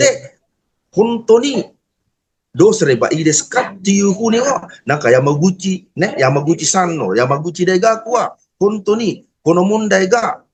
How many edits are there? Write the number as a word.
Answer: zero